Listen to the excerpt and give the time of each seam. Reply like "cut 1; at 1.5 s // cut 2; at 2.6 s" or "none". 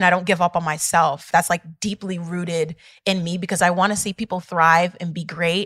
cut 1; at 1.2 s